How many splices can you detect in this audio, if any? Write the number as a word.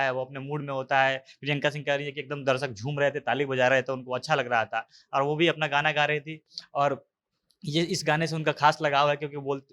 zero